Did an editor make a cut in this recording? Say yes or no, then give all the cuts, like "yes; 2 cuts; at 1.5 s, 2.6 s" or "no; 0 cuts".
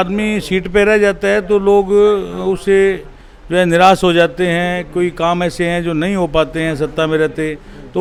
no; 0 cuts